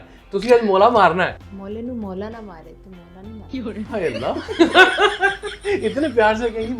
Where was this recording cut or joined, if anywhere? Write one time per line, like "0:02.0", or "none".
0:01.5